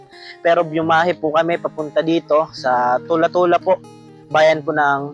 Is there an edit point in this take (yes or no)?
no